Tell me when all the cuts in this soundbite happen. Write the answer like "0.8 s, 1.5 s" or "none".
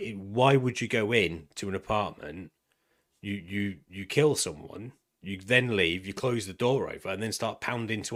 none